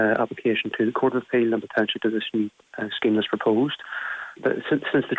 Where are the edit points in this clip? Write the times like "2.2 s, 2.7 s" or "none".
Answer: 4.3 s